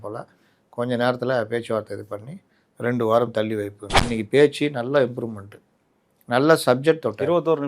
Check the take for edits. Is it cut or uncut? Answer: cut